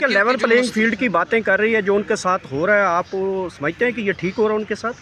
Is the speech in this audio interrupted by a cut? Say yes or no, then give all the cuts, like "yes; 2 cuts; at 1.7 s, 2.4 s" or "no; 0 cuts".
no; 0 cuts